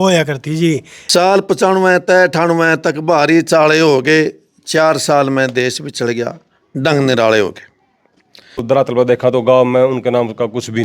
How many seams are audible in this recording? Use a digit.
2